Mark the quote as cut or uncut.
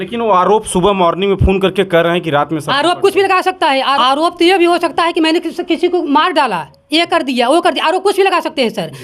cut